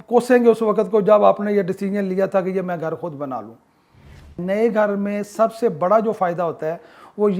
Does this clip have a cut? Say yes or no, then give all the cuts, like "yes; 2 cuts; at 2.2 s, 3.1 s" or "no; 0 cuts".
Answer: yes; 1 cut; at 4.2 s